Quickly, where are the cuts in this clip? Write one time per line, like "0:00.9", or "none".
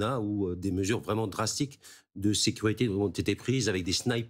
none